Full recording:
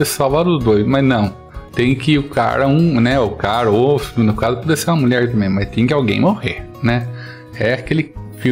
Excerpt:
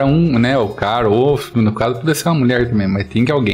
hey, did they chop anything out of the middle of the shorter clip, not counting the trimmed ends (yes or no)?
no